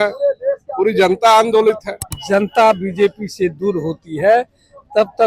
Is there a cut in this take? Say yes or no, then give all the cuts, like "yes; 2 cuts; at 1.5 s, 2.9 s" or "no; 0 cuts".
yes; 1 cut; at 2.2 s